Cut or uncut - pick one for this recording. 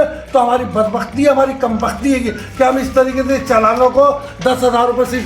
uncut